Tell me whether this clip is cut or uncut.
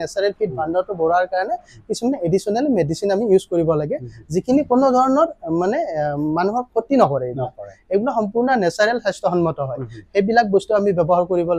uncut